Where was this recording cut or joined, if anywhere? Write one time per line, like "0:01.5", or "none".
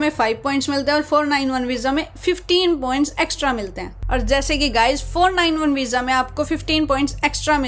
none